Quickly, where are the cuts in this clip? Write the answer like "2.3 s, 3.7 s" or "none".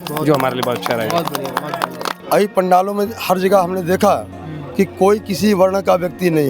2.2 s